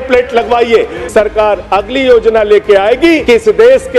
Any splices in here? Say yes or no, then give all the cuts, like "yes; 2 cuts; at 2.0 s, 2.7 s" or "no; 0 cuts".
yes; 2 cuts; at 1.3 s, 3.2 s